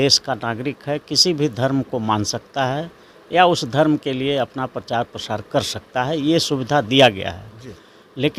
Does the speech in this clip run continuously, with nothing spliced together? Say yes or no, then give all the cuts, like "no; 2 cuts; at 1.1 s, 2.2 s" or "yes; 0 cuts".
yes; 0 cuts